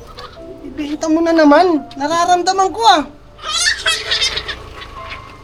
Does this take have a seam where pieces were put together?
no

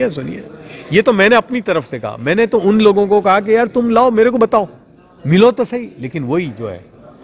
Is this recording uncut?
yes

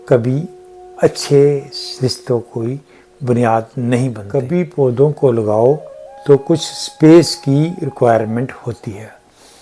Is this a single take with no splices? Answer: no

